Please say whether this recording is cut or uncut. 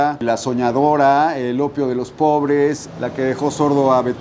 cut